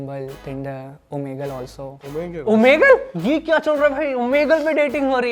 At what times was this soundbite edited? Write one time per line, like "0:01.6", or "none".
0:03.1